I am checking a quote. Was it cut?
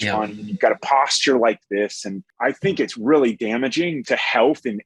yes; 2 cuts; at 2.2 s, 4.0 s

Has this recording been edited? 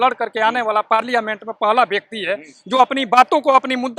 no; 0 cuts

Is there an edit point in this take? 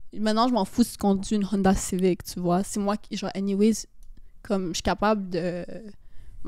no; 0 cuts

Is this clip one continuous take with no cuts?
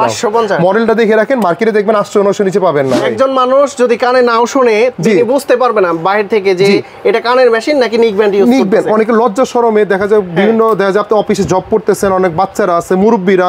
no; 1 cut; at 3.0 s

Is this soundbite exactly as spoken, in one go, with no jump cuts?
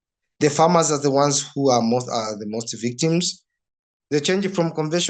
no; 1 cut; at 3.6 s

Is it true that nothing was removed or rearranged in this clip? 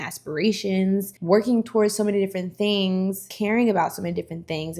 no; 1 cut; at 3.3 s

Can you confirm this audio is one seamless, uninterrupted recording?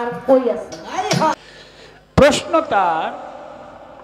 no; 1 cut; at 1.4 s

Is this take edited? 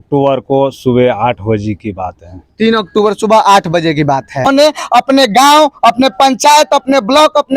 yes; 1 cut; at 4.5 s

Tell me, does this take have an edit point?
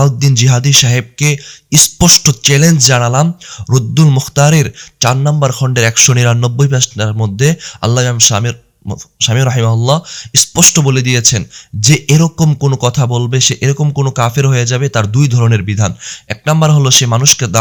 no; 0 cuts

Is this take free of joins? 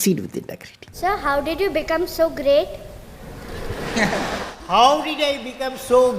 no; 1 cut; at 1.0 s

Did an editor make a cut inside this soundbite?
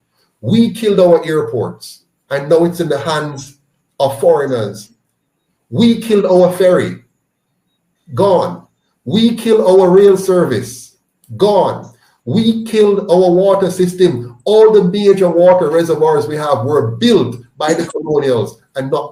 no; 0 cuts

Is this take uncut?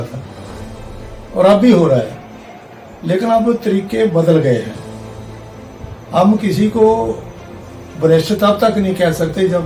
yes; 0 cuts

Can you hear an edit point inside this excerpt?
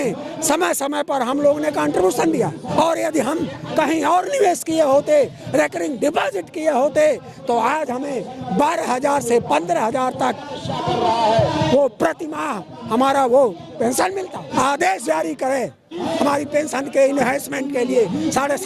yes; 2 cuts; at 2.7 s, 14.4 s

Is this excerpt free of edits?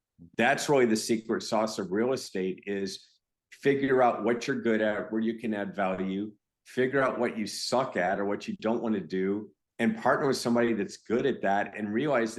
yes; 0 cuts

